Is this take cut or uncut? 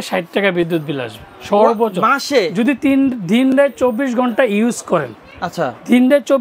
uncut